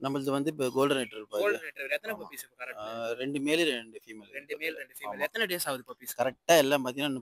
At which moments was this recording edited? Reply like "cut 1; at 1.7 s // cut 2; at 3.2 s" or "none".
none